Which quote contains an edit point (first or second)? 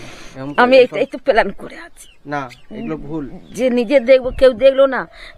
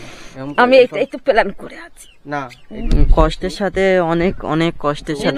second